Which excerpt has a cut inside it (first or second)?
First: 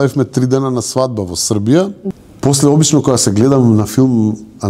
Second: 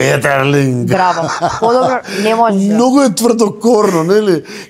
first